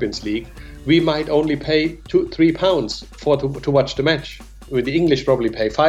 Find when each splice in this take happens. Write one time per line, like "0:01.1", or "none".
0:04.6